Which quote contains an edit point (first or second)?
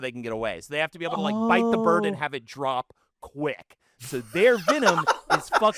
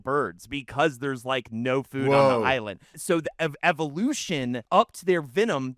second